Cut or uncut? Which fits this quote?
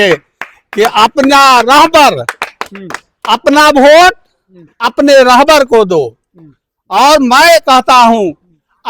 uncut